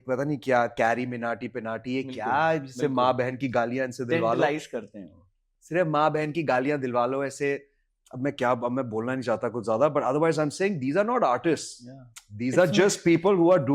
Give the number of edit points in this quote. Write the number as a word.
zero